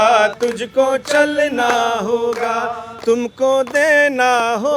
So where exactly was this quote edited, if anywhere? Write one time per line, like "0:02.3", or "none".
none